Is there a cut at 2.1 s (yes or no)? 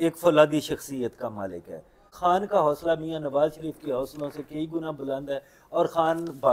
yes